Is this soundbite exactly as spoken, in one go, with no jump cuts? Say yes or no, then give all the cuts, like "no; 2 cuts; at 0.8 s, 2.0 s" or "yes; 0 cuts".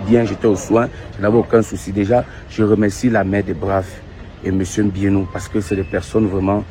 yes; 0 cuts